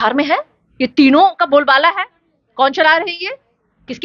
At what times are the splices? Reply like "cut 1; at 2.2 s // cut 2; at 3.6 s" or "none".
none